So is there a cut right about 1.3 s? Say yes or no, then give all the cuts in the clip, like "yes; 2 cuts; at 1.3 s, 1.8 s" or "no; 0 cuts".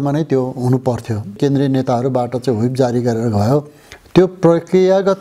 yes; 1 cut; at 1.3 s